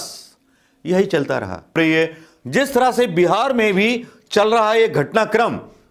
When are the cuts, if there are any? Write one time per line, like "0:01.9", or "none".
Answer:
0:01.8